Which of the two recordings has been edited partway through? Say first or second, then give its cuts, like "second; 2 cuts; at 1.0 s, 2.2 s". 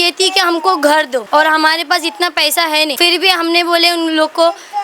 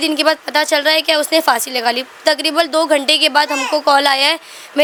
first; 2 cuts; at 1.3 s, 2.9 s